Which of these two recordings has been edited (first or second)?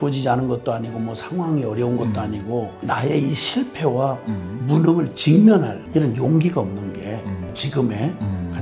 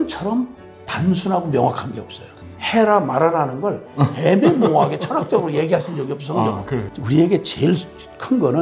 second